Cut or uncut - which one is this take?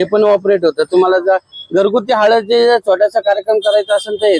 uncut